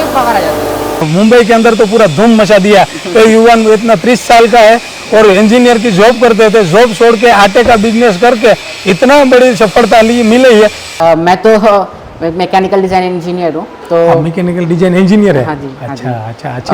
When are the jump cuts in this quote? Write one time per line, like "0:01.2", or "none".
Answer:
0:01.1
0:10.9